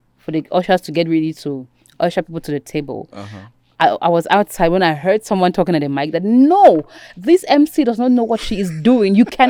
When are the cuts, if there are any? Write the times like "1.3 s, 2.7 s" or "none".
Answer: none